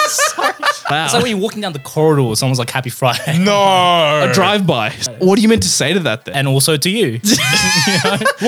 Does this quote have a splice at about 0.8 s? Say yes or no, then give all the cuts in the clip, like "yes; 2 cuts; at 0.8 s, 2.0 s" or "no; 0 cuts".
yes; 3 cuts; at 0.8 s, 5.0 s, 6.3 s